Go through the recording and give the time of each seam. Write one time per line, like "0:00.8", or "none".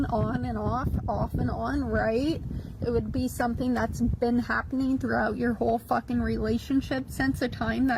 0:00.9